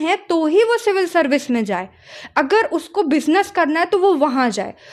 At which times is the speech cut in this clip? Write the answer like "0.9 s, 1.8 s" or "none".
none